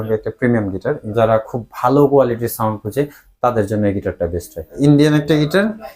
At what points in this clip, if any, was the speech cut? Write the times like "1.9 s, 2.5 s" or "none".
1.0 s, 4.7 s